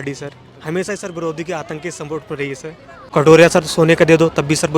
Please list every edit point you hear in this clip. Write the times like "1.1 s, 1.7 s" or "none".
3.0 s